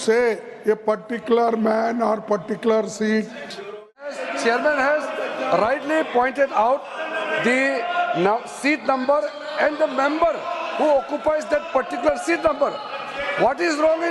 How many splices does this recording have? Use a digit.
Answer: 1